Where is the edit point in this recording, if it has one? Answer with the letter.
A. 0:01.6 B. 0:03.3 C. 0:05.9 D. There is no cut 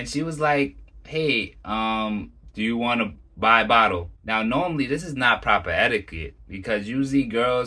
D